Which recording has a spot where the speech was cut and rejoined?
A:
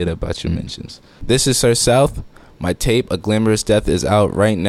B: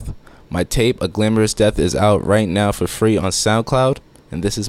A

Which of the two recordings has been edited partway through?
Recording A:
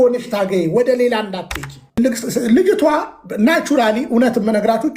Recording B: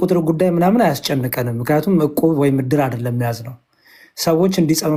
A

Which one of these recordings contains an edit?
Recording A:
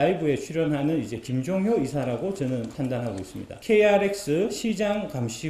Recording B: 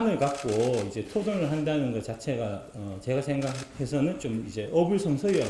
A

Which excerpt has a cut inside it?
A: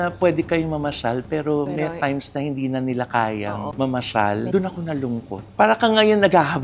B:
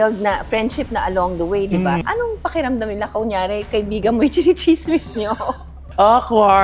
A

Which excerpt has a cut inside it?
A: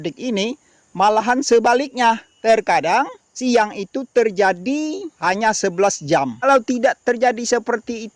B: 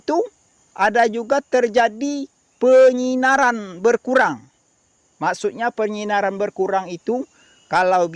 A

